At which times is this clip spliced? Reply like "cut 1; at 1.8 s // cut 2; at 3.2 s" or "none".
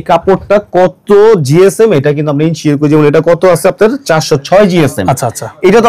none